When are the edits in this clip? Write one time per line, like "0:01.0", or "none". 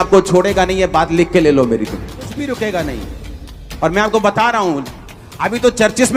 0:02.3